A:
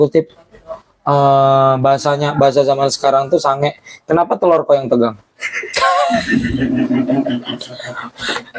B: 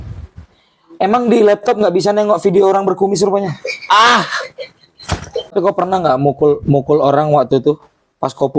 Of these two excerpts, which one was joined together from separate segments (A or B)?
B